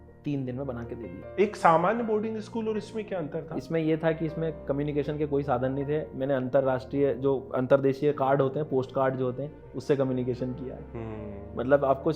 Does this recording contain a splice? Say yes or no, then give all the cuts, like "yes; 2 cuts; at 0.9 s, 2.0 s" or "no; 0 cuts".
yes; 1 cut; at 1.2 s